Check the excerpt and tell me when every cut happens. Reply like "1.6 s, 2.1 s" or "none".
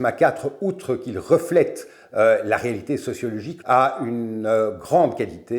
3.5 s